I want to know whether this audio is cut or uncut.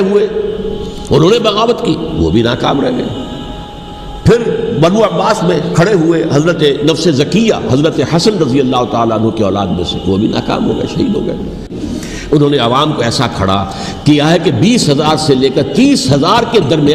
cut